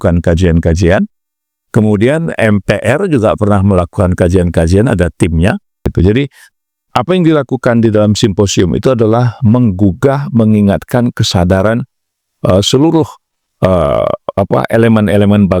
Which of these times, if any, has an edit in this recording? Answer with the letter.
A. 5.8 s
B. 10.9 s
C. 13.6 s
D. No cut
A